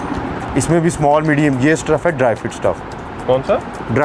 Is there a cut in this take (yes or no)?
no